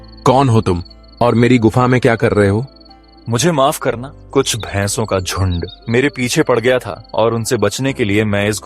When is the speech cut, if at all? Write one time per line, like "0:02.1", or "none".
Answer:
0:04.1
0:05.7
0:07.0